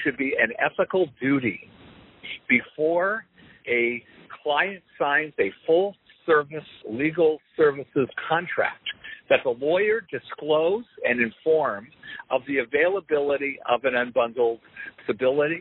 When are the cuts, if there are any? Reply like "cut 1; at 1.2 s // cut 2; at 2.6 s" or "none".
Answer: none